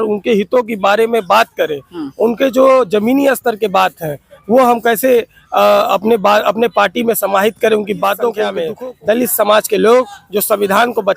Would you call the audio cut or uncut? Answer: cut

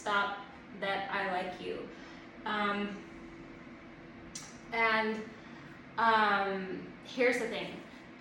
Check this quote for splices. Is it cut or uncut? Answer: uncut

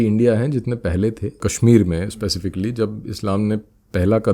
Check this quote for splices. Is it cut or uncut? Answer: cut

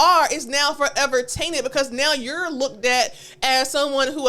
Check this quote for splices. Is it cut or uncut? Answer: uncut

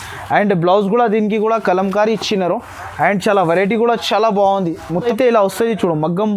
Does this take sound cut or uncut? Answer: cut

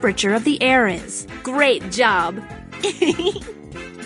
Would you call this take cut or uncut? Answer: cut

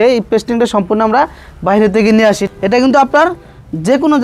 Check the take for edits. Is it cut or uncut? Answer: cut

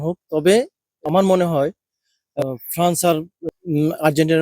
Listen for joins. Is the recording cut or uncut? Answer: cut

